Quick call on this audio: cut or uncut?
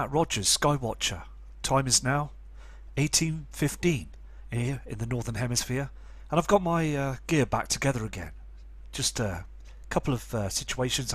uncut